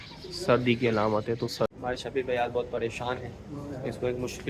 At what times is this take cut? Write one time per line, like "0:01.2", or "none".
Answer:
0:01.7